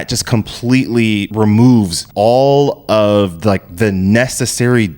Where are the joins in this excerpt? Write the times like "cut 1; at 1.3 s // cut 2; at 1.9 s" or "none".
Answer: cut 1; at 1.3 s // cut 2; at 2.0 s